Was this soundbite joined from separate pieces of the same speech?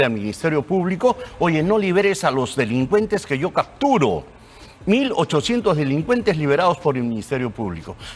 no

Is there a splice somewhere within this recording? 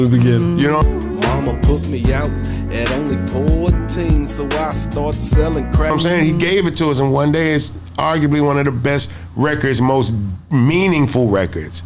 yes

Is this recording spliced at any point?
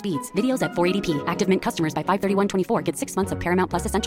no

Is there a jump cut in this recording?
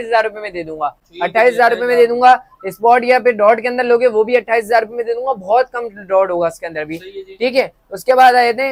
no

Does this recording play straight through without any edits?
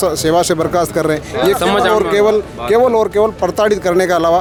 yes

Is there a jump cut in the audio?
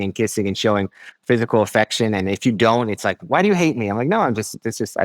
no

